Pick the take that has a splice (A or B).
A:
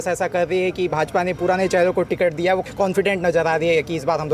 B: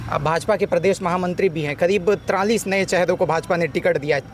A